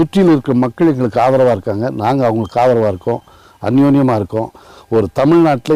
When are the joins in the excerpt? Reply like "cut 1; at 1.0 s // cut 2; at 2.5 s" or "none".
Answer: none